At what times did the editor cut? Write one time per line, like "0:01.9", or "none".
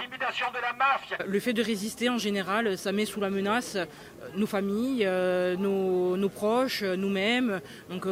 0:01.2